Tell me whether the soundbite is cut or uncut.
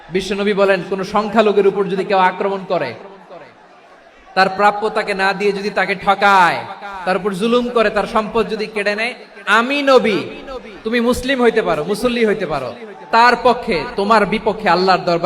uncut